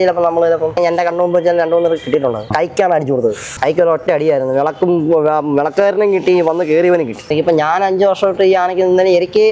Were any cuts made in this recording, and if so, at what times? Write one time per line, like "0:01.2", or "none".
0:00.8
0:02.5
0:03.5
0:07.3